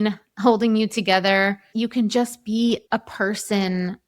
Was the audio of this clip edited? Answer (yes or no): yes